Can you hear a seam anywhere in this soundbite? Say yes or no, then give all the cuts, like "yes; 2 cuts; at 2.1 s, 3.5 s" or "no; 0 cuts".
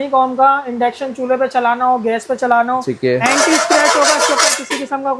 no; 0 cuts